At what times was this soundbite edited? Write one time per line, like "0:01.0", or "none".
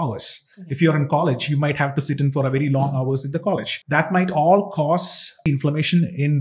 0:03.7
0:05.5